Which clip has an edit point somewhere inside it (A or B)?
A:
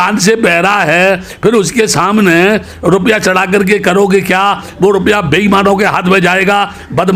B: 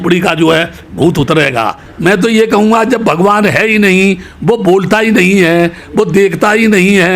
B